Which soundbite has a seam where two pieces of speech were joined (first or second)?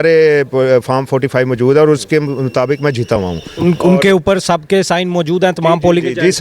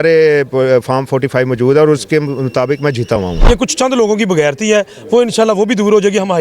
second